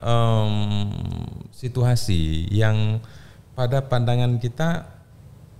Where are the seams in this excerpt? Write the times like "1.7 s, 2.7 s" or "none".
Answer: none

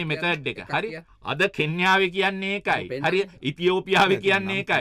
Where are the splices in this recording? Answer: 1.1 s

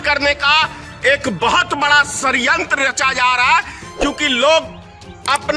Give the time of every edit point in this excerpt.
none

